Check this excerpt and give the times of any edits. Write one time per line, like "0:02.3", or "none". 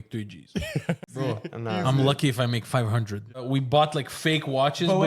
0:01.2
0:03.4